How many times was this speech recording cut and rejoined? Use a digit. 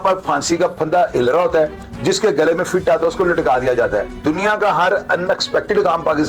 1